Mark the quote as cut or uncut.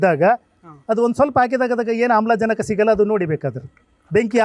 uncut